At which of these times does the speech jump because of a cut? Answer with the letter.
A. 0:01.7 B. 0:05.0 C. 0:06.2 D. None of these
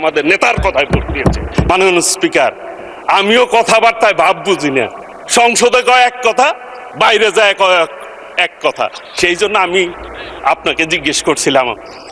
A